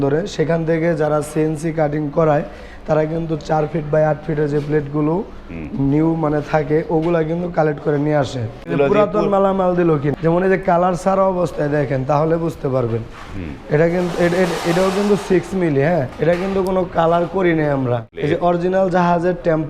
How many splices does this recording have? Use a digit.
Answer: 4